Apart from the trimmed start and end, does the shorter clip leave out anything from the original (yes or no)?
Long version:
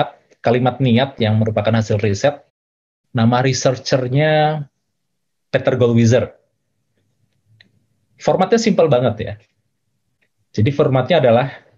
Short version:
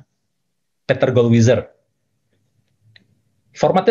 no